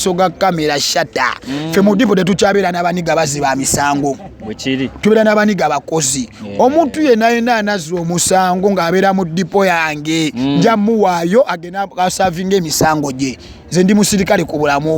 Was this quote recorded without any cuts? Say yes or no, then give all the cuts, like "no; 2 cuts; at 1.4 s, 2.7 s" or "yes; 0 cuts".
yes; 0 cuts